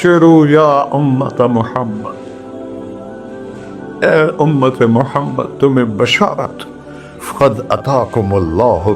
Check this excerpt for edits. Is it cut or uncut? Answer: cut